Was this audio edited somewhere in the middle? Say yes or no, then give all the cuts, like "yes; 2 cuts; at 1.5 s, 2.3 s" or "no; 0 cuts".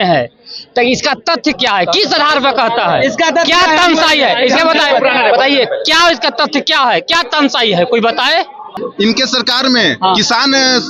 yes; 1 cut; at 8.8 s